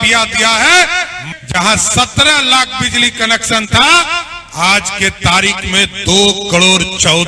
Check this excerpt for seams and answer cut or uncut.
cut